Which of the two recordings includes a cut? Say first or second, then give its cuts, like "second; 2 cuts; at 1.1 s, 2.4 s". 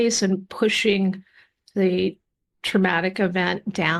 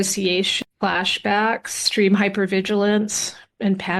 second; 1 cut; at 1.8 s